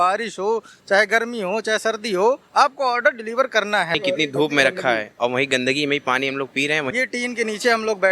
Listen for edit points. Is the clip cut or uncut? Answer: cut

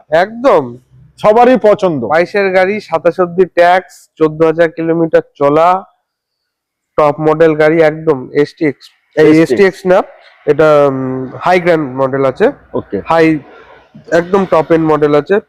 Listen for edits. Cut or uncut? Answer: uncut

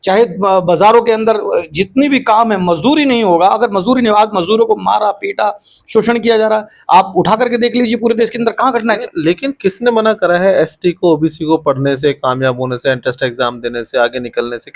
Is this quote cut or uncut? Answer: cut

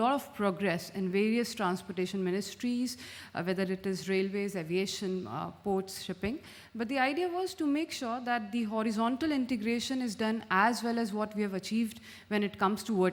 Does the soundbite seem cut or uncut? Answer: uncut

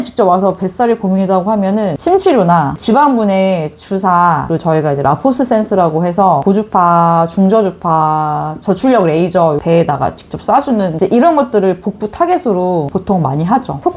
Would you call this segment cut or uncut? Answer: cut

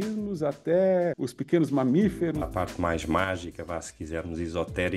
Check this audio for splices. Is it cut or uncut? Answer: cut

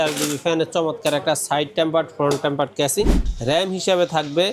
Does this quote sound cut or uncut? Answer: cut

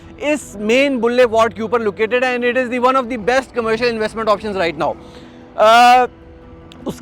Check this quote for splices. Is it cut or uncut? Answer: uncut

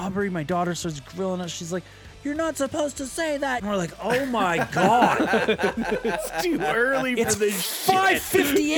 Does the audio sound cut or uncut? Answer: cut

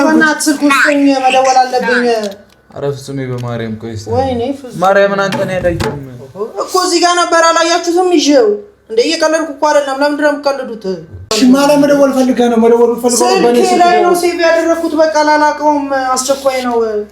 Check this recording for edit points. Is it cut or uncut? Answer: cut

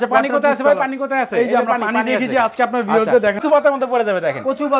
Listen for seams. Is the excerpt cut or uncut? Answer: cut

